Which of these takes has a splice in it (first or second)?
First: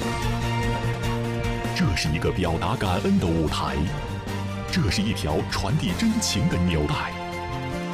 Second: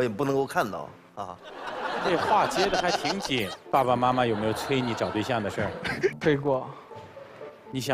second